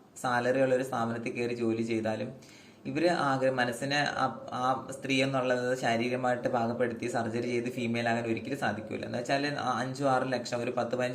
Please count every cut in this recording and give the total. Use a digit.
0